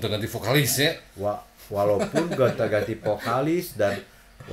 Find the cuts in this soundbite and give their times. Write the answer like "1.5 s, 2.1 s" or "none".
none